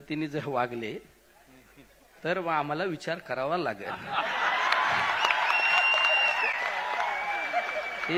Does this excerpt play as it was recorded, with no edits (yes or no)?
yes